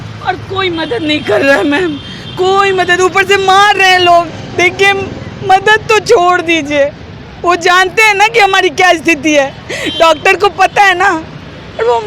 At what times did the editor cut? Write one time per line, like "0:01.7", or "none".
none